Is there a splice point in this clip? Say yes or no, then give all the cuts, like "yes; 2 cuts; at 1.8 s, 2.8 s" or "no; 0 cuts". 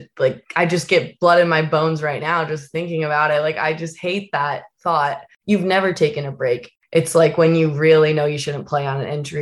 yes; 2 cuts; at 5.3 s, 6.7 s